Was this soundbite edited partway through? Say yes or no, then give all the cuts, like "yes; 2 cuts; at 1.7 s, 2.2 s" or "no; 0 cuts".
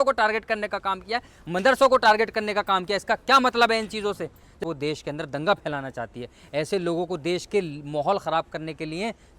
yes; 1 cut; at 4.6 s